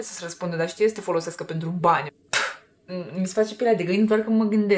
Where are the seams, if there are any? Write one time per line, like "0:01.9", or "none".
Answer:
0:02.2